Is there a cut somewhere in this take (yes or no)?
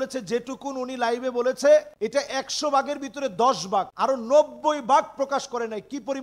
yes